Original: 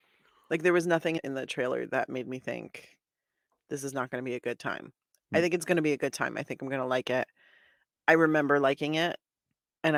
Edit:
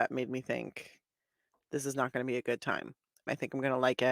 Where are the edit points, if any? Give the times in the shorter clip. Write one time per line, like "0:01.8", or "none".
0:03.2